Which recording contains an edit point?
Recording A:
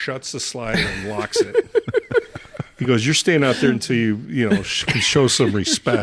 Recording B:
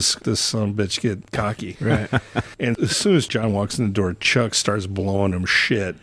B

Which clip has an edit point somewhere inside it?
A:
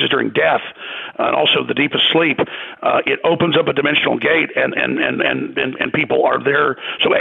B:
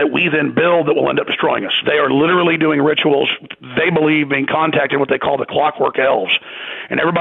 B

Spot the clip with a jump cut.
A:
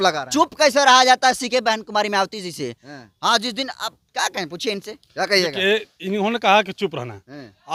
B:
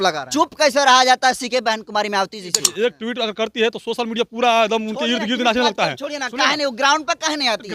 B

